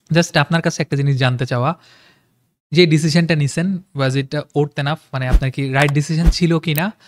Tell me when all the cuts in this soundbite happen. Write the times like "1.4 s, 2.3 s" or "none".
none